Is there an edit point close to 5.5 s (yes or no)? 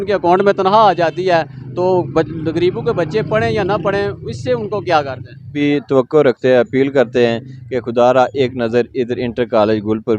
yes